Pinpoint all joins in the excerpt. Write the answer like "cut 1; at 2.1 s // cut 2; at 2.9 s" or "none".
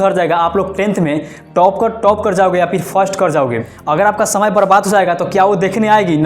cut 1; at 3.7 s